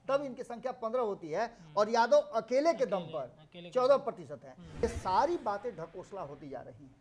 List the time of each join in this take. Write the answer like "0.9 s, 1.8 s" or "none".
4.8 s